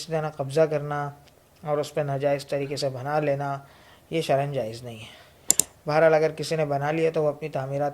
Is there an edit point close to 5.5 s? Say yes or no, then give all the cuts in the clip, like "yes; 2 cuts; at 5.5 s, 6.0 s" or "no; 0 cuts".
yes; 1 cut; at 5.5 s